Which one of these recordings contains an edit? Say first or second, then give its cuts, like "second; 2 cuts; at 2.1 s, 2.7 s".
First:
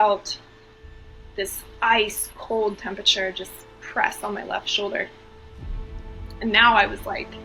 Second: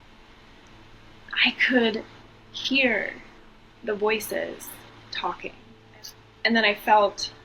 second; 1 cut; at 5.7 s